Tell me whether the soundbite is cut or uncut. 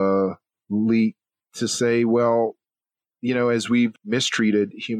cut